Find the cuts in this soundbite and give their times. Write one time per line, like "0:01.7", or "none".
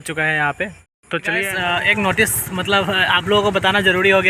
0:01.3